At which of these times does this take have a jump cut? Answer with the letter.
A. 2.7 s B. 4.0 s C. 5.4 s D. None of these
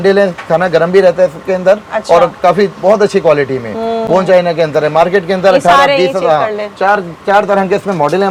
D